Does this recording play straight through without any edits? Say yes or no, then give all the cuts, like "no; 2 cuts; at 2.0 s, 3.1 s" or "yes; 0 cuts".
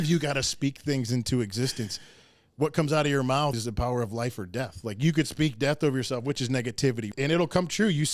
no; 2 cuts; at 3.6 s, 7.1 s